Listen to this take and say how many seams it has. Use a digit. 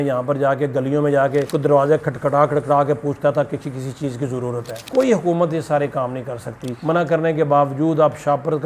2